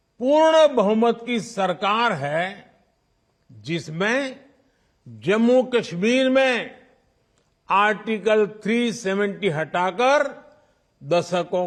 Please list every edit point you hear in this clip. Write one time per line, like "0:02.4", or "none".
none